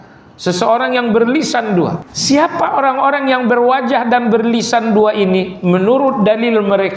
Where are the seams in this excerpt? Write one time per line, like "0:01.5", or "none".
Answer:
0:02.1